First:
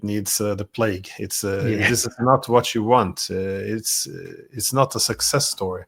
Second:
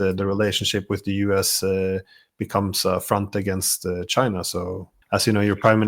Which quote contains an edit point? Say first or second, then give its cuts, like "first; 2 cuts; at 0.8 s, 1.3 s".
second; 1 cut; at 5.0 s